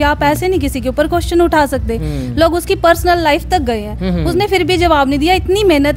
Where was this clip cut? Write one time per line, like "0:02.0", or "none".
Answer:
none